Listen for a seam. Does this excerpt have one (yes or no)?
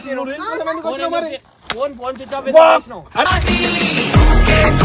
no